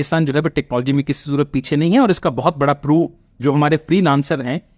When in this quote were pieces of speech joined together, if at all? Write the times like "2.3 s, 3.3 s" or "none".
none